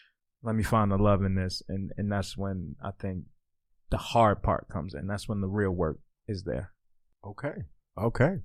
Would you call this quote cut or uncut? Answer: uncut